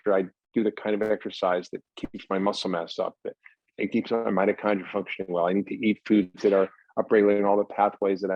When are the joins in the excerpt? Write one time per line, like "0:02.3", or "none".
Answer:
none